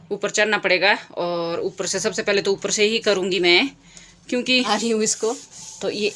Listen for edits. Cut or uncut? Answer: cut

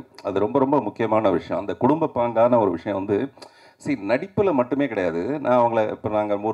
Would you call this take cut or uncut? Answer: uncut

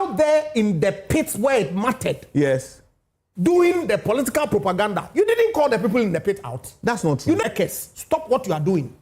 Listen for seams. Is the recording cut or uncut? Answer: cut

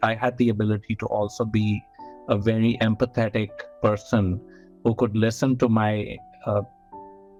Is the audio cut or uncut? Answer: uncut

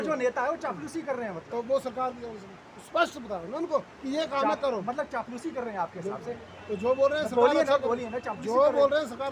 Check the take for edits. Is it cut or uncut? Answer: uncut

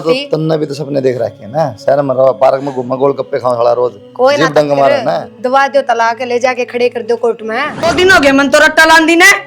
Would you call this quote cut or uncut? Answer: cut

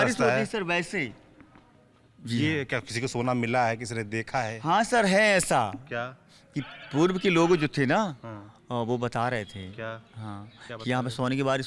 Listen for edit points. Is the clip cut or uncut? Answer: uncut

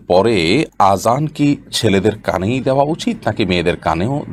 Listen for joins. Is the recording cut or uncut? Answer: uncut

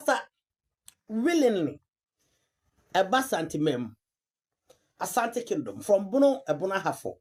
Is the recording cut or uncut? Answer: uncut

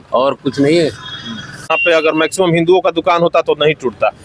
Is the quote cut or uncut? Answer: cut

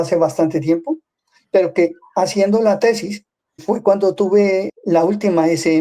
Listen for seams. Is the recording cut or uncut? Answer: cut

